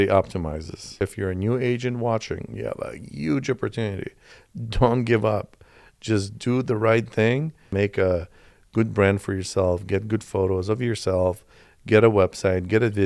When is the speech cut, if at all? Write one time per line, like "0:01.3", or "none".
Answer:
0:01.0
0:07.7

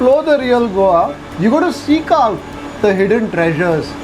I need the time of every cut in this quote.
0:01.2

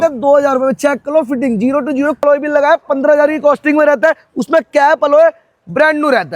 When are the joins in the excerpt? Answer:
0:02.2

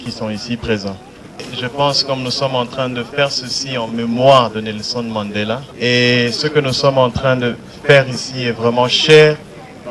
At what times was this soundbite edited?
0:01.3
0:05.6

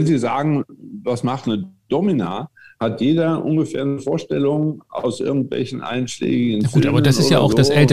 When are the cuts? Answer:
none

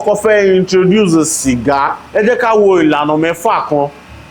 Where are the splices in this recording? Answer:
0:02.0

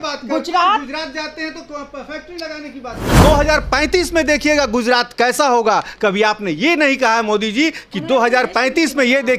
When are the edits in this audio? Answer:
0:03.2

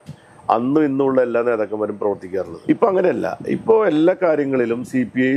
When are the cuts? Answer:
0:02.5

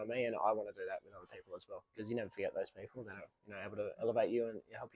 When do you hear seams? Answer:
0:01.9

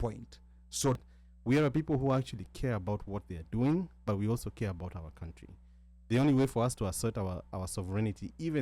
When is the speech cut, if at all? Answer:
0:01.0

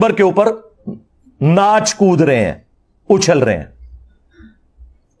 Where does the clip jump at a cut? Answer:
none

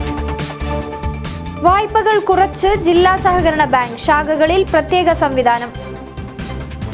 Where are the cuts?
0:00.9

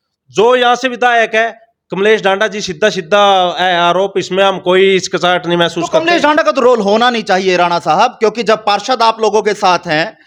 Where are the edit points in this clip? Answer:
none

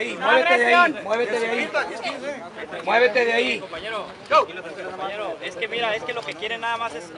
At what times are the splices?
0:03.1

